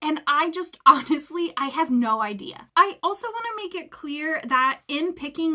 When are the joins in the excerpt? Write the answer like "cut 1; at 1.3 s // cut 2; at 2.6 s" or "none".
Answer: none